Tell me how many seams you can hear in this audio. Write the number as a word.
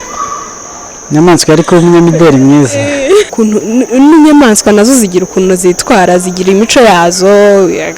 one